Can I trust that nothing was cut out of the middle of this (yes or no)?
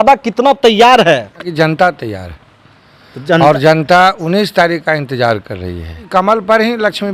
no